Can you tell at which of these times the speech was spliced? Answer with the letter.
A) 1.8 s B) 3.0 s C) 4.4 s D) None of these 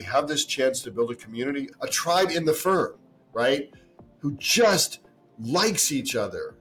A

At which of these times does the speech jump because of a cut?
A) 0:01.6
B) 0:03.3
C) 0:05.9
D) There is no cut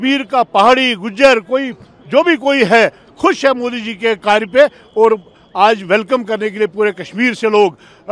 D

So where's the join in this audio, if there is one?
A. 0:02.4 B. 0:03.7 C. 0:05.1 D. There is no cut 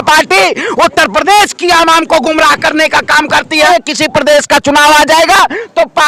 B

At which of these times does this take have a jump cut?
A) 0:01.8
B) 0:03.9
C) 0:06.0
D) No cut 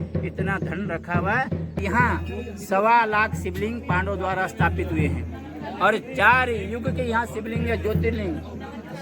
A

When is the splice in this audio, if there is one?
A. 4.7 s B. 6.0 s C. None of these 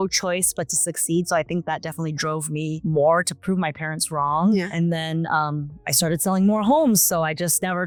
C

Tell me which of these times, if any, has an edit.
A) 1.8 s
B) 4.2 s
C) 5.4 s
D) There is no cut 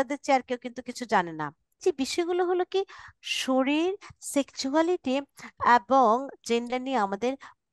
A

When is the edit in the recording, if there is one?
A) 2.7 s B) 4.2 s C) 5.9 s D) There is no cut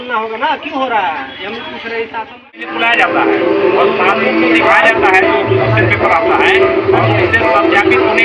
A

